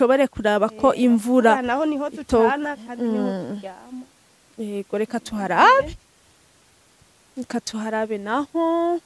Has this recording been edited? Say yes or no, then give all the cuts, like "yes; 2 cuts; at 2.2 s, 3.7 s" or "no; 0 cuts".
no; 0 cuts